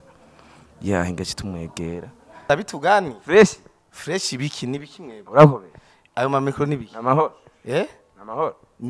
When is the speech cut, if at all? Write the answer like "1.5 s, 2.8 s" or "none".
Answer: 2.3 s